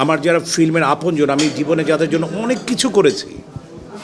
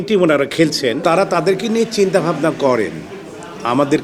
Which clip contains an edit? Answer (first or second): second